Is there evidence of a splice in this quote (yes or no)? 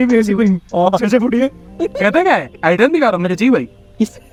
no